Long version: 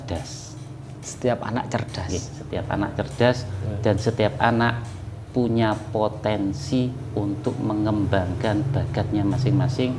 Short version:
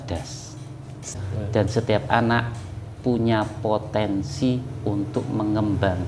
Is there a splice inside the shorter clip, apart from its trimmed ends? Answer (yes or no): yes